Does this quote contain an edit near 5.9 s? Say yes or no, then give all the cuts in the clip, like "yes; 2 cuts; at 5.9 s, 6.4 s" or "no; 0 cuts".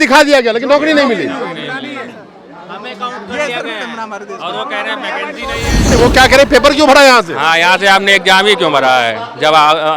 yes; 1 cut; at 5.9 s